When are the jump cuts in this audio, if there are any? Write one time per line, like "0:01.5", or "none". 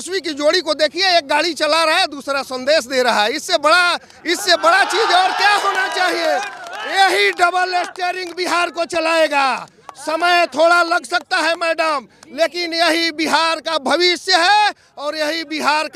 none